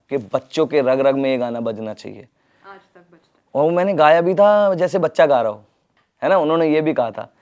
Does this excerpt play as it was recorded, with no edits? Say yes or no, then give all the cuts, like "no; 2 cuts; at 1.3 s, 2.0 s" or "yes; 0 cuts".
yes; 0 cuts